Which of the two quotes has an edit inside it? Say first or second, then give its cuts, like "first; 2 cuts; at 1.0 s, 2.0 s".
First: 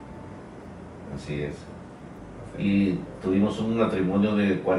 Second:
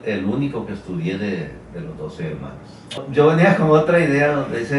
second; 1 cut; at 3.0 s